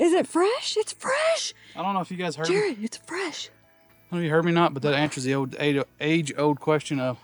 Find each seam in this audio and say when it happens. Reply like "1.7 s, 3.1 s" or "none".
none